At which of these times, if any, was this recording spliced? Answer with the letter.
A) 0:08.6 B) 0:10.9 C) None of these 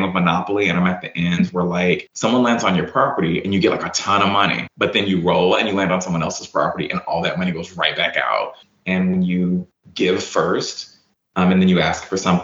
A